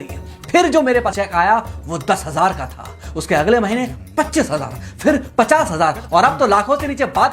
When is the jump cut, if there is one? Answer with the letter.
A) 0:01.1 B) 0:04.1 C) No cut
A